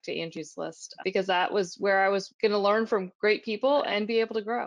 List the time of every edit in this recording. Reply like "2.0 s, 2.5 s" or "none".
2.3 s, 3.9 s